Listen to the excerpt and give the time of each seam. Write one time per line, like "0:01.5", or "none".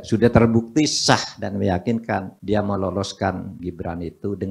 0:02.3
0:03.5